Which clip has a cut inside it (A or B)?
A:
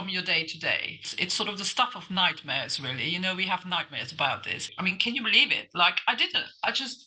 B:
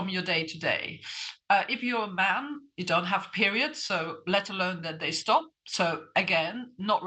A